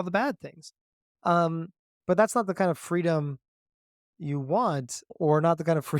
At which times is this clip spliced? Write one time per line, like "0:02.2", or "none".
0:05.0